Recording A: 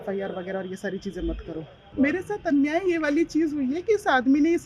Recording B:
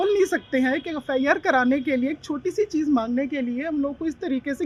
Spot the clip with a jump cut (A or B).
A